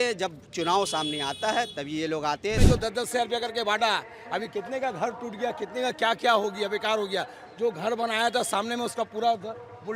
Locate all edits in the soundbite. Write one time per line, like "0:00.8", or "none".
0:02.6